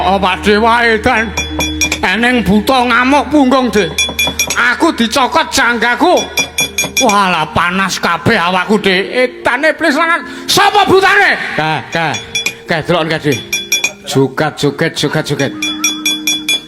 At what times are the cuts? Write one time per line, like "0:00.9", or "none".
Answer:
none